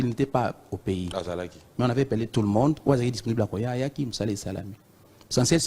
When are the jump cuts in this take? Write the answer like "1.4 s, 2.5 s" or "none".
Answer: 1.6 s